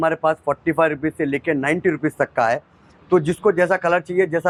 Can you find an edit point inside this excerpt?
no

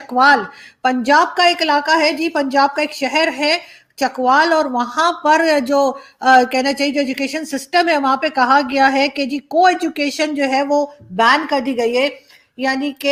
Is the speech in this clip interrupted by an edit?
no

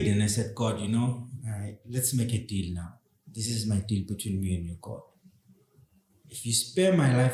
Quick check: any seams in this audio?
no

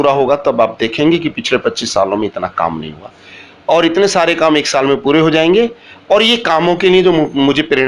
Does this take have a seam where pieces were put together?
no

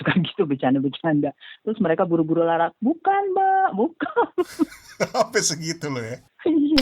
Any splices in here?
yes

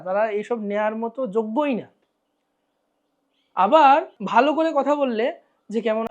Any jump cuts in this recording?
yes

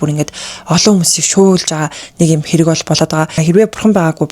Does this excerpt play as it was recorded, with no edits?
no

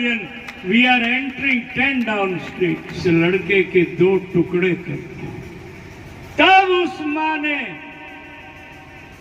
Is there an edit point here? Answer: yes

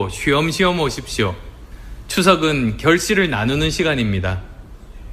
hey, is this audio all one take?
no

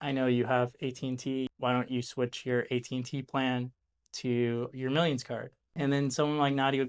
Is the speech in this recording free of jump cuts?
no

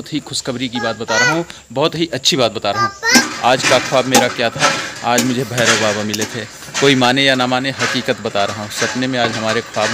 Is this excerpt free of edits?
no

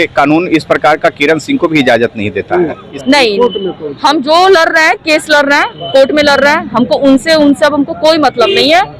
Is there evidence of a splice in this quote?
yes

